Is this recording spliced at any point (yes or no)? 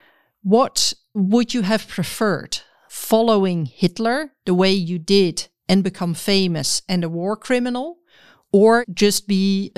yes